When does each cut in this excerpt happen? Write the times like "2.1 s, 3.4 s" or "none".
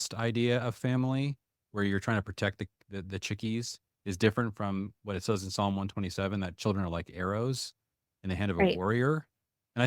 none

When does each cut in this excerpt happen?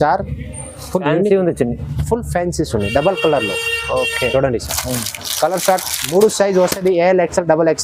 none

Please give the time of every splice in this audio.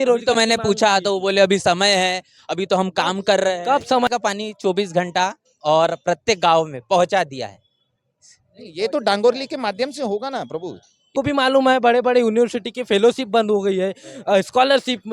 4.1 s, 11.1 s

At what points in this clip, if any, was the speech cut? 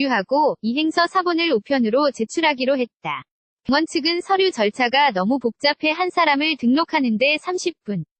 3.7 s

